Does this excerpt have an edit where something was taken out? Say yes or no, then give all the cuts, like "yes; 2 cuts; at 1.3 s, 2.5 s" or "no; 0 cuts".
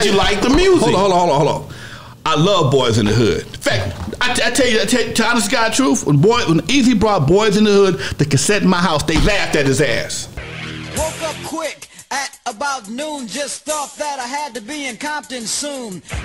no; 0 cuts